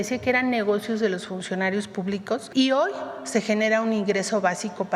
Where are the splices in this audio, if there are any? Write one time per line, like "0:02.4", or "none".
0:02.5